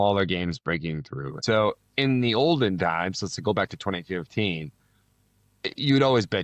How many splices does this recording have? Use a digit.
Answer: 1